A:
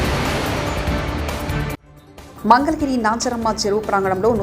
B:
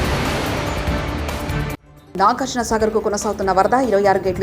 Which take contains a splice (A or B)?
A